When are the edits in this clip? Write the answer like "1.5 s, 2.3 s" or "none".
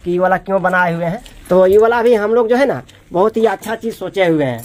1.3 s